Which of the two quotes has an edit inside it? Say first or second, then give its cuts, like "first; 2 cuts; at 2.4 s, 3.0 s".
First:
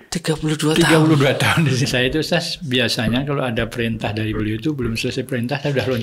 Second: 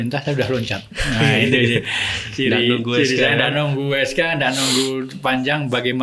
first; 1 cut; at 1.8 s